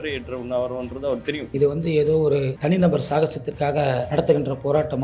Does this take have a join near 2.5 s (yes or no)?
yes